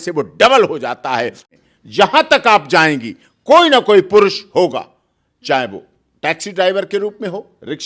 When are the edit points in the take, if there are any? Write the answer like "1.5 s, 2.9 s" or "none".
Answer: 1.4 s